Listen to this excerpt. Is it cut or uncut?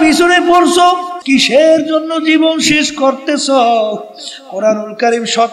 cut